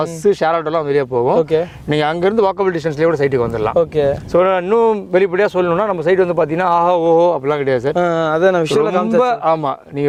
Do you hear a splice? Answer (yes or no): no